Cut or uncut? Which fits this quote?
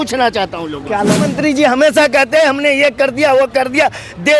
cut